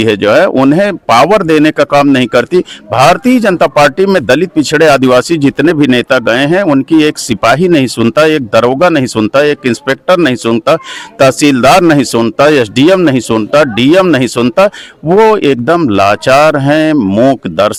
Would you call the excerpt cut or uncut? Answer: uncut